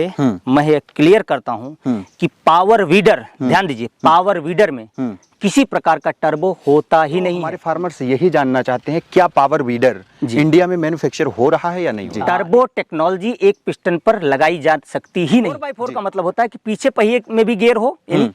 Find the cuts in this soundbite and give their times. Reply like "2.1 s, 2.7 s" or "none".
7.5 s, 12.1 s, 15.7 s